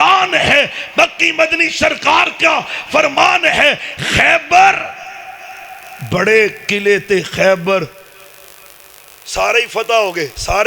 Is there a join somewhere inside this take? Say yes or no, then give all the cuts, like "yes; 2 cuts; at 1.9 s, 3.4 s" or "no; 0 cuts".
no; 0 cuts